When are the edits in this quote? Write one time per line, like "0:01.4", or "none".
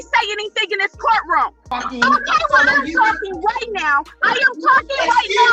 0:01.6